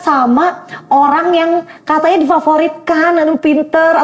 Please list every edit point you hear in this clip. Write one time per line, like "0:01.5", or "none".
none